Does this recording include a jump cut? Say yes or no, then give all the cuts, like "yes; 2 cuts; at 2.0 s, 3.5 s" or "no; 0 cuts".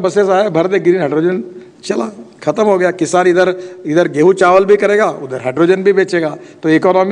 no; 0 cuts